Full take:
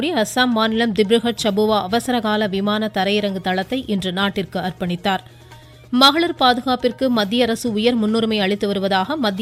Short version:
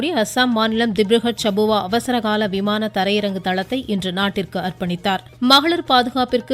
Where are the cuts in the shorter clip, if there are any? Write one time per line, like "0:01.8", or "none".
0:05.3